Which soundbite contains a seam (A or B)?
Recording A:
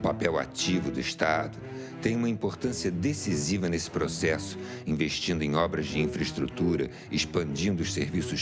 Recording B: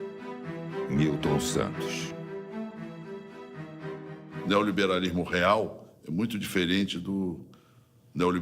B